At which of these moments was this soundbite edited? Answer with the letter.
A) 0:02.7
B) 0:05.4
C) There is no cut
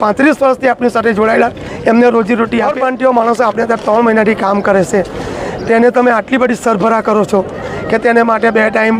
A